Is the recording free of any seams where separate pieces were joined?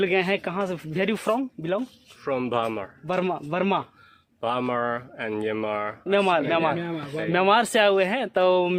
yes; 0 cuts

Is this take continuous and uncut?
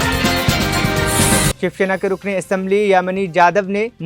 no; 1 cut; at 1.5 s

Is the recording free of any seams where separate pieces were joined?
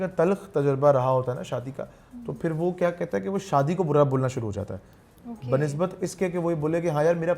yes; 0 cuts

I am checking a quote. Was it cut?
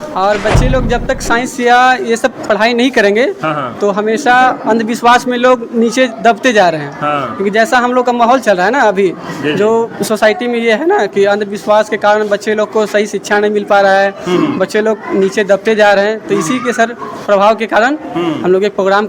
no; 0 cuts

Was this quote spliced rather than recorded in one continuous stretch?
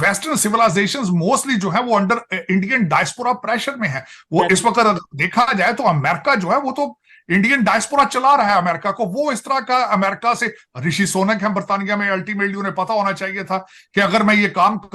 no; 0 cuts

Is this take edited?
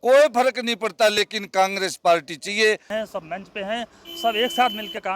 yes; 1 cut; at 2.9 s

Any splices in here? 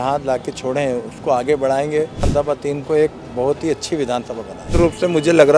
yes; 2 cuts; at 2.3 s, 4.7 s

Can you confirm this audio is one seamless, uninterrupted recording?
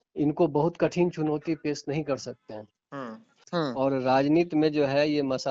no; 1 cut; at 3.3 s

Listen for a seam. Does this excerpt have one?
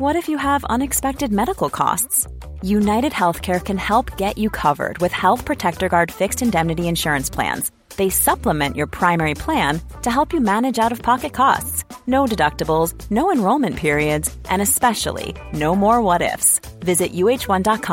no; 0 cuts

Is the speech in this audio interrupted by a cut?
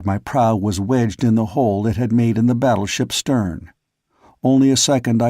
yes; 1 cut; at 2.9 s

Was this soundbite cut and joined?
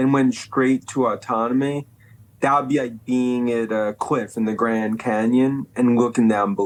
no; 0 cuts

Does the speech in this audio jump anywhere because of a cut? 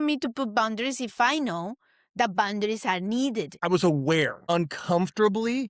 yes; 1 cut; at 3.6 s

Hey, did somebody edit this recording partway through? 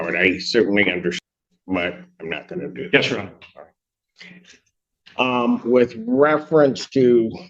yes; 1 cut; at 1.2 s

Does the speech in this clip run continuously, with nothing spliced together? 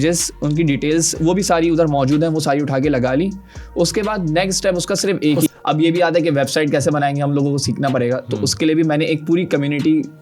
no; 1 cut; at 5.5 s

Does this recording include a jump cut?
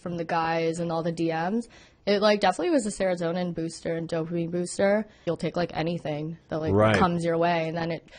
yes; 1 cut; at 5.2 s

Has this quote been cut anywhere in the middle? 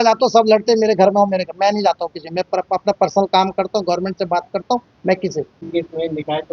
yes; 1 cut; at 5.6 s

